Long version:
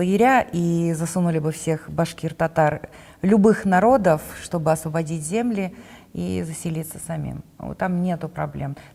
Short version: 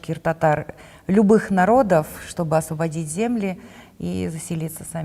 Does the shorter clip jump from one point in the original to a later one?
no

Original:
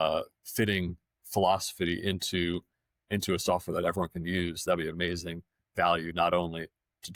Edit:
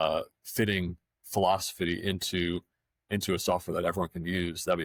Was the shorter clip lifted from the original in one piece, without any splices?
yes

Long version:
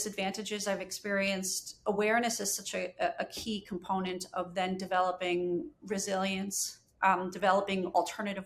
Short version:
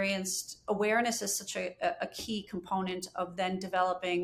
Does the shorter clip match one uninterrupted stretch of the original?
yes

